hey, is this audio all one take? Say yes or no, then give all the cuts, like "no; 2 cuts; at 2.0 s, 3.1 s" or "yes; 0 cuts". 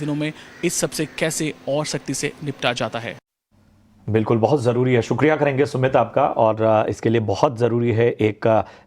no; 1 cut; at 4.6 s